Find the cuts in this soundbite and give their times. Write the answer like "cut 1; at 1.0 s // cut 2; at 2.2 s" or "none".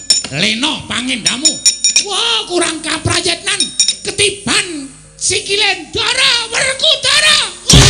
none